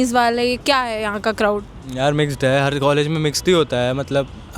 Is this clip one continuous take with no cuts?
yes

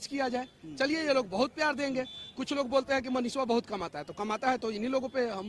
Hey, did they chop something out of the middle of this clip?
no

